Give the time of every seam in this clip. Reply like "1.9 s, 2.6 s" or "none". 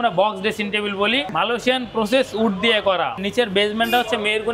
1.3 s, 3.2 s